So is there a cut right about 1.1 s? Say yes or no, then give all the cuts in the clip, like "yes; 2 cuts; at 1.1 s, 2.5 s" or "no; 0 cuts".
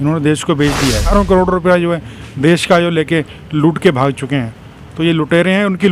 yes; 1 cut; at 1.1 s